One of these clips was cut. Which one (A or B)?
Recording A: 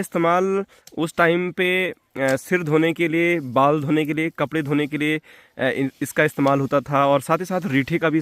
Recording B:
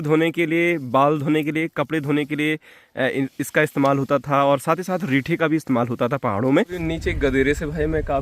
B